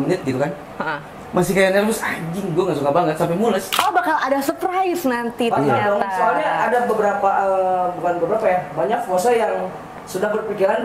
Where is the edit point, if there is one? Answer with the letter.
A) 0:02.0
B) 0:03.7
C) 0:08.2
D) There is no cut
B